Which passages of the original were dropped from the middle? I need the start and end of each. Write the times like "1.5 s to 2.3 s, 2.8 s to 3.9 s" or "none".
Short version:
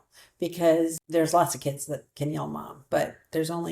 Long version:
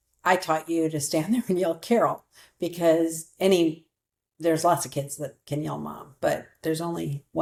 3.2 s to 4.3 s

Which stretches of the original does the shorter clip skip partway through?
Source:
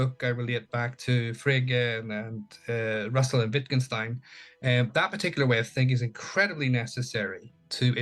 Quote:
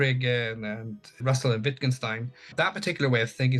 2.6 s to 3.1 s, 4.4 s to 4.9 s

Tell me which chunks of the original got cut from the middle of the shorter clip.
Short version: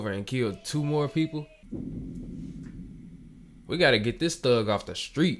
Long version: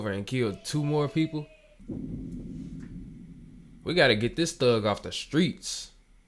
1.6 s to 1.7 s

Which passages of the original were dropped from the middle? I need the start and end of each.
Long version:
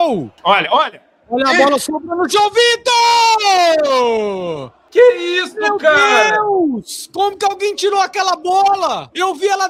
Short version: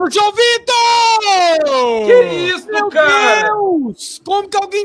4.2 s to 4.9 s

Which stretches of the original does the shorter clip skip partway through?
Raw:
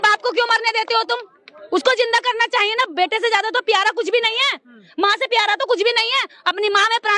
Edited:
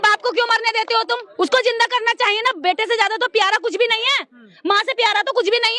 1.3 s to 1.6 s

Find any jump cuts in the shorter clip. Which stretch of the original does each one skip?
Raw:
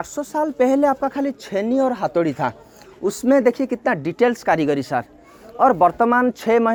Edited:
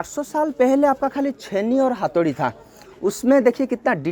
none

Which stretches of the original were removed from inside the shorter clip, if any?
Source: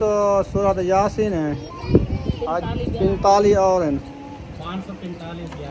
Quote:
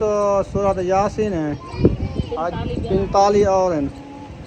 1.7 s to 1.8 s

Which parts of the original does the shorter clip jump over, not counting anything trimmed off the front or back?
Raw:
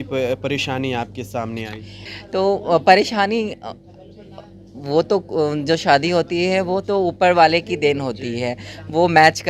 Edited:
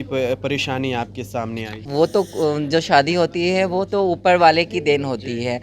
1.8 s to 4.7 s

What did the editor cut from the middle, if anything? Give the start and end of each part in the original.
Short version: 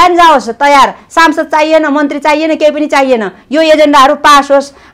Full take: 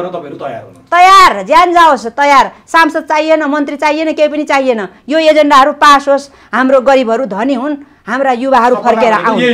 none

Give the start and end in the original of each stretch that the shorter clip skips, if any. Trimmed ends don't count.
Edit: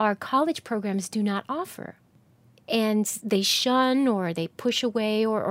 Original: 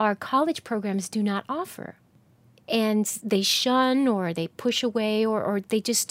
none

